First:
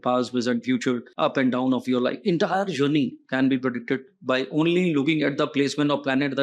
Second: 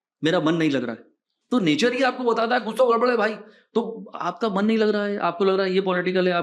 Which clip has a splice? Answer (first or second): first